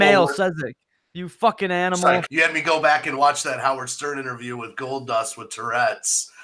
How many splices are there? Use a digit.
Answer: 1